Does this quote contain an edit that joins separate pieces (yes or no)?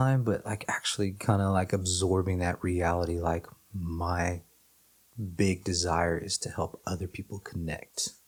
no